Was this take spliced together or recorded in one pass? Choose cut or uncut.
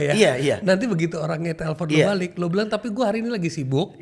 uncut